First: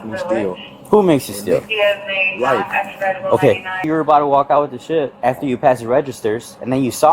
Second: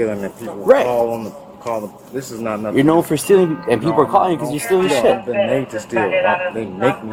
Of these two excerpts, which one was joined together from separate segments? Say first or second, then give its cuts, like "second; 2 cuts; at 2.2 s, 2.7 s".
first; 1 cut; at 3.9 s